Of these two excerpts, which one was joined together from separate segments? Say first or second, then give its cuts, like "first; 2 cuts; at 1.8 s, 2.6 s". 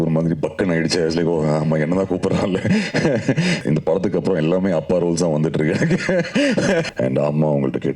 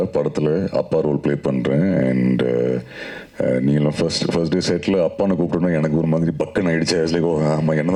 first; 2 cuts; at 3.6 s, 6.9 s